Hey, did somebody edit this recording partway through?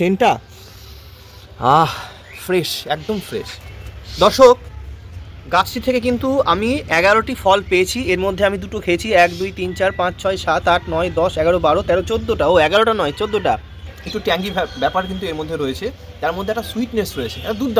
yes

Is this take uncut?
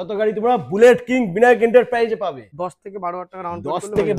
no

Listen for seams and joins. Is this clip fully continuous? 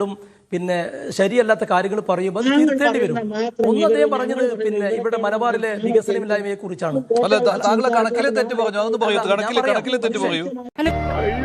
yes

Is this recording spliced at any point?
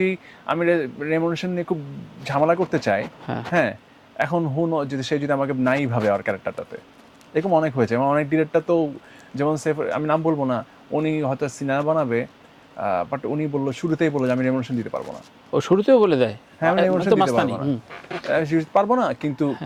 no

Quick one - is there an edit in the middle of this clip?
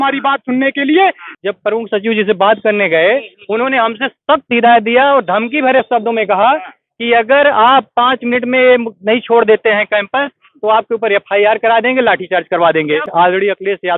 yes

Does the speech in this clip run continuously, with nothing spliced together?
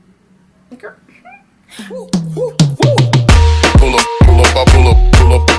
no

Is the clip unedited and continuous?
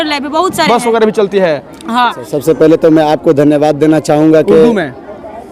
no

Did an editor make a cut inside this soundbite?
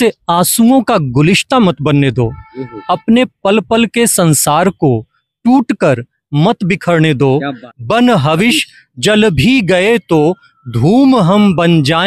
yes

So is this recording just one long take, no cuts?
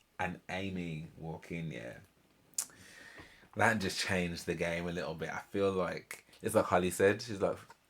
no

